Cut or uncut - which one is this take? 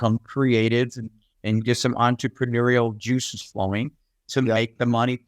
uncut